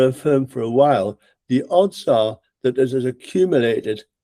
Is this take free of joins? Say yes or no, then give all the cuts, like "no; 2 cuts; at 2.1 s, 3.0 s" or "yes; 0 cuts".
yes; 0 cuts